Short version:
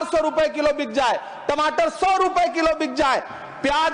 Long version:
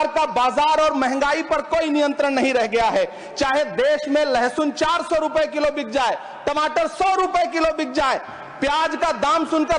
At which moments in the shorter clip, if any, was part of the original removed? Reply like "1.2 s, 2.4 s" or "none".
none

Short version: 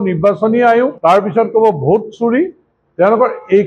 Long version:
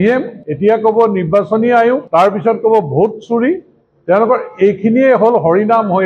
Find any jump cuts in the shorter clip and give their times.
none

